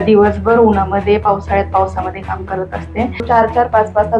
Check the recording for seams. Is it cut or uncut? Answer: cut